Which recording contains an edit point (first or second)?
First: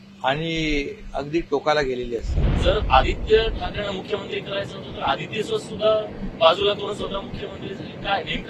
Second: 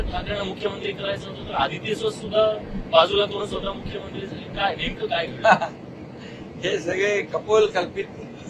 first